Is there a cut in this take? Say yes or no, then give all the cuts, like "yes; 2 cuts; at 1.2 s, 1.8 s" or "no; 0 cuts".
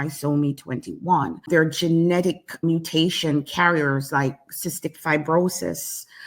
yes; 1 cut; at 1.4 s